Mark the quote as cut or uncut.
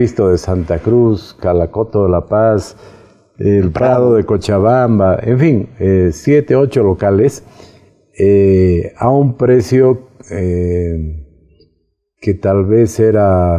uncut